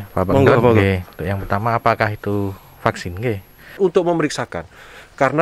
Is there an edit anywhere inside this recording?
yes; 1 cut; at 3.8 s

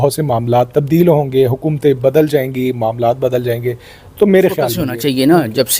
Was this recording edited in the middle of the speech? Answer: yes; 1 cut; at 4.9 s

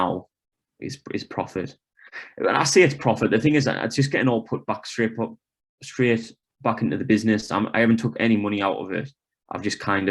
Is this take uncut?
yes; 0 cuts

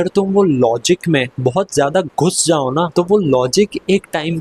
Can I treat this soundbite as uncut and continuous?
no; 2 cuts; at 1.3 s, 2.9 s

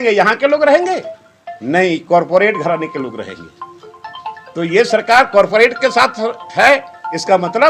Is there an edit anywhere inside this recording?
no; 0 cuts

